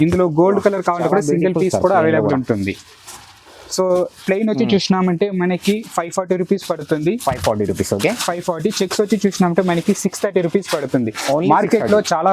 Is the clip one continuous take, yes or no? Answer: yes